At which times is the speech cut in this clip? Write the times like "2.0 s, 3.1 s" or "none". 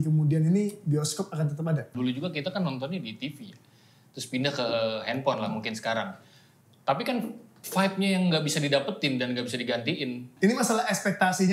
1.9 s, 10.3 s